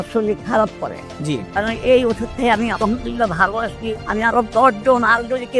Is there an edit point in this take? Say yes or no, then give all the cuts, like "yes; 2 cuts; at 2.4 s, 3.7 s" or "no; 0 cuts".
yes; 1 cut; at 1.5 s